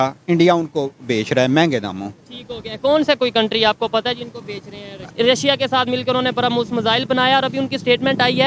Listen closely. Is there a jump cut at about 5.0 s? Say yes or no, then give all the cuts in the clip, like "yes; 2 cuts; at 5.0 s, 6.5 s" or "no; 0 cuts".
yes; 1 cut; at 5.0 s